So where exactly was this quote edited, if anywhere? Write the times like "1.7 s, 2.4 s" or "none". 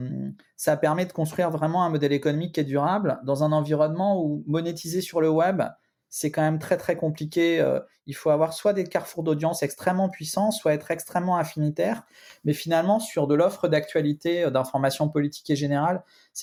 none